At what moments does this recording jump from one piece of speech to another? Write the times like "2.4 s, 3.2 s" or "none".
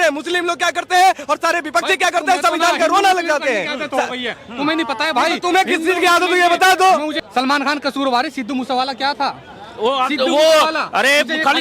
7.2 s